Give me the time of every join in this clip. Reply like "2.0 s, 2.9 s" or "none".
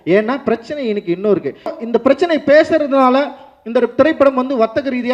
1.8 s